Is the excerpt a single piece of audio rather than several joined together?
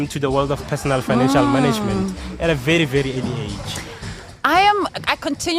yes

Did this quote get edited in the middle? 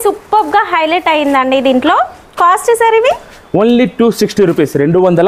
no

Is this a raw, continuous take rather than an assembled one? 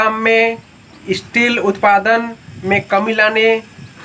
yes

